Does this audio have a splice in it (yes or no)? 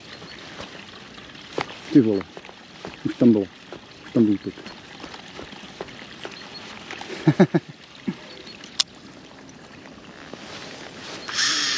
no